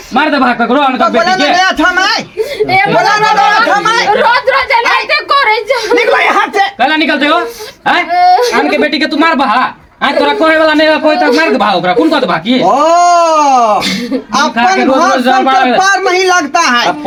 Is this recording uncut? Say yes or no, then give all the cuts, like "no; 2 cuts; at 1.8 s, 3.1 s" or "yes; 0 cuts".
yes; 0 cuts